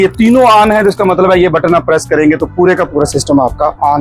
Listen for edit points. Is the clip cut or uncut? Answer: uncut